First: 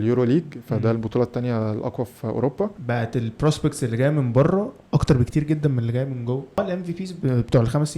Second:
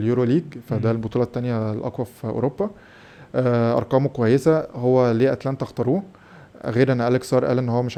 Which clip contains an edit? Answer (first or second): first